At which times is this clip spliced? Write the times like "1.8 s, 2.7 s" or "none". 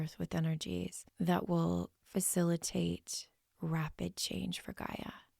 1.0 s, 2.0 s